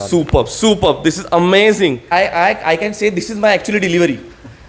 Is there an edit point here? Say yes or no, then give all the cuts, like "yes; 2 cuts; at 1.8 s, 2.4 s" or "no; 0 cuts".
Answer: yes; 1 cut; at 2.0 s